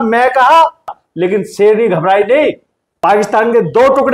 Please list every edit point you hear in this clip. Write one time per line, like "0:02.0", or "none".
0:01.0
0:02.9